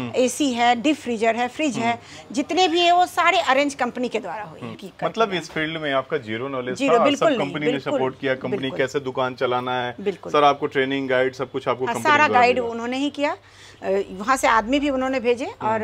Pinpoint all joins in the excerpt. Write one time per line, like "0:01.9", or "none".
0:04.9